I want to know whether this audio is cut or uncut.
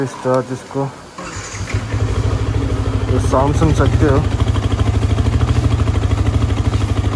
uncut